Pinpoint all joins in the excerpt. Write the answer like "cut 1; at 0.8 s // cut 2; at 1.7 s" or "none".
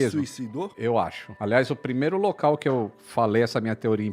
cut 1; at 0.9 s